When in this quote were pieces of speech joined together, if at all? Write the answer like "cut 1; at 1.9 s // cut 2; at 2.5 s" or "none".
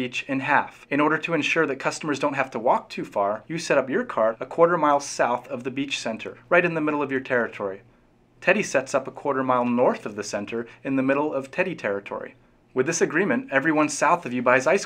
cut 1; at 4.1 s